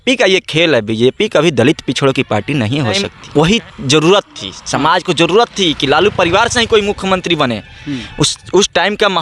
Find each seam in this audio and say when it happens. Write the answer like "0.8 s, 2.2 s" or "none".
3.1 s